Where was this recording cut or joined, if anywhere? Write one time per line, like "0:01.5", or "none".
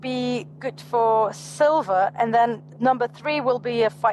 0:02.6